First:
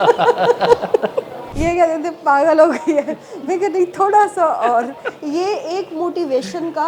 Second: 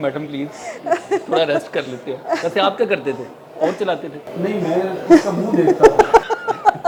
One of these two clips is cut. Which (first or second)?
first